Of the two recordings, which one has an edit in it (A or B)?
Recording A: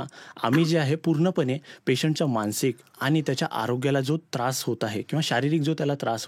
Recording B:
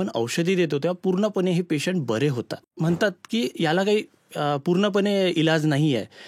B